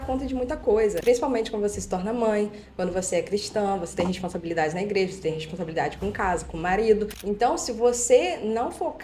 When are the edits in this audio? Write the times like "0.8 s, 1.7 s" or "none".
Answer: 1.0 s, 7.1 s